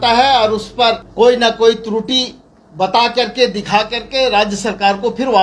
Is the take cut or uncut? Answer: cut